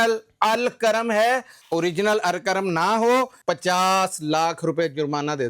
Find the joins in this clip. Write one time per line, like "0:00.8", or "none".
0:01.5
0:03.4